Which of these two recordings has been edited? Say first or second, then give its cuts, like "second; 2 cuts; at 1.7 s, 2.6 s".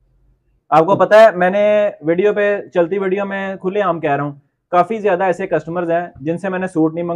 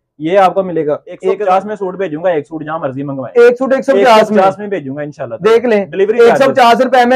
second; 1 cut; at 1.3 s